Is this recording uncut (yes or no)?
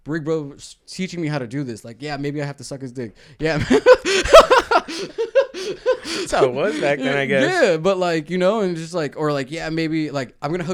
yes